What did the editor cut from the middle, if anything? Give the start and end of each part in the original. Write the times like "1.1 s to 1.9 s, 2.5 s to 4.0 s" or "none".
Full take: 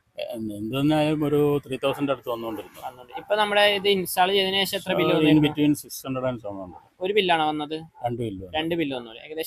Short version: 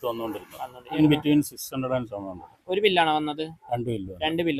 3.2 s to 5.3 s